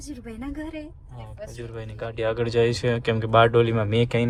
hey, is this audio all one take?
yes; 0 cuts

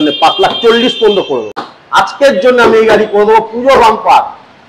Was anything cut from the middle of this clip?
yes; 1 cut; at 1.6 s

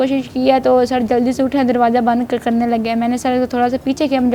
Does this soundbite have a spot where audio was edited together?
no; 0 cuts

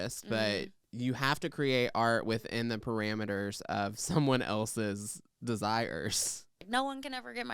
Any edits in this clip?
yes; 1 cut; at 6.6 s

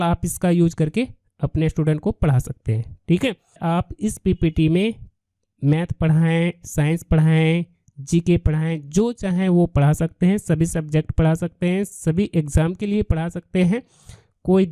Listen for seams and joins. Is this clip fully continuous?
no; 1 cut; at 3.6 s

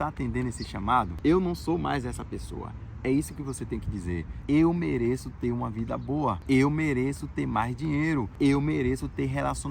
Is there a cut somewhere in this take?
yes; 3 cuts; at 1.1 s, 4.3 s, 8.3 s

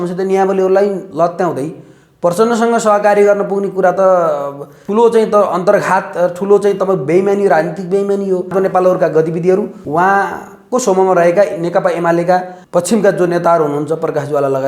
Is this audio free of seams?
no; 4 cuts; at 4.7 s, 8.5 s, 9.8 s, 12.6 s

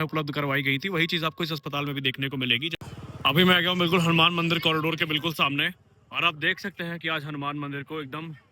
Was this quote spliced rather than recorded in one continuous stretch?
yes; 1 cut; at 2.7 s

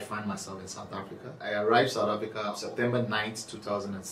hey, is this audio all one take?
no; 2 cuts; at 1.4 s, 2.6 s

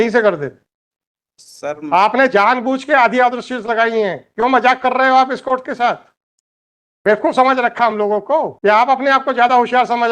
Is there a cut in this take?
yes; 1 cut; at 8.5 s

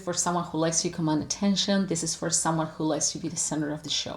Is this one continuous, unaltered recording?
yes; 0 cuts

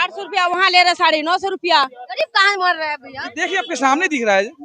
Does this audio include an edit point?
yes; 1 cut; at 2.0 s

